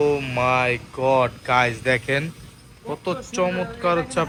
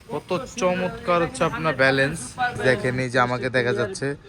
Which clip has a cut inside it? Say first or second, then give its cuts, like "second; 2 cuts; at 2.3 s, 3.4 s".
second; 1 cut; at 2.6 s